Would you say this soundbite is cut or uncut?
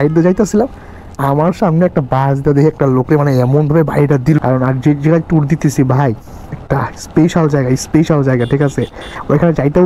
cut